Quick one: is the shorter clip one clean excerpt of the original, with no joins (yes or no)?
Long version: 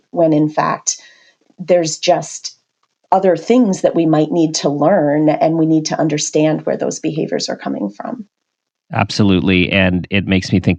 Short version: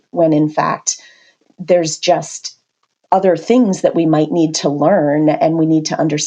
yes